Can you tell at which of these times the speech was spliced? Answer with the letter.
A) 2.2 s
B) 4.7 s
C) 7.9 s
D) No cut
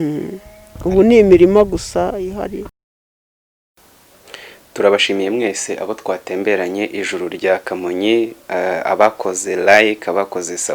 D